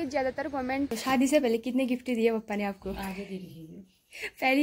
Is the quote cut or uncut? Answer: cut